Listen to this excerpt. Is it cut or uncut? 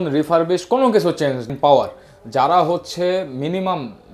cut